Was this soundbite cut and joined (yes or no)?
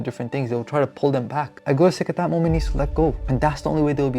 yes